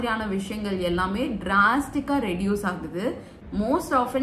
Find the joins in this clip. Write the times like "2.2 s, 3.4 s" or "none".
3.3 s